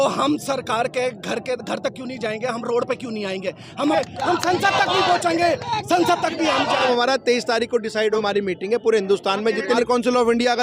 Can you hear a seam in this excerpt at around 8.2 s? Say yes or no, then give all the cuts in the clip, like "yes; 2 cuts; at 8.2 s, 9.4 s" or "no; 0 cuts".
yes; 4 cuts; at 3.9 s, 6.8 s, 8.2 s, 9.8 s